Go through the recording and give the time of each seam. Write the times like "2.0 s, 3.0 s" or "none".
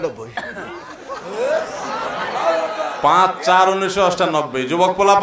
none